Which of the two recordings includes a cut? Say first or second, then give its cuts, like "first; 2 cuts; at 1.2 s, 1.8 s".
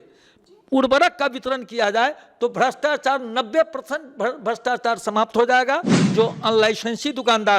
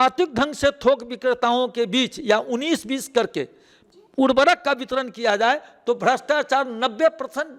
first; 1 cut; at 6.0 s